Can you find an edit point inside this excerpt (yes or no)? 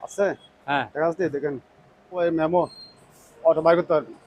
yes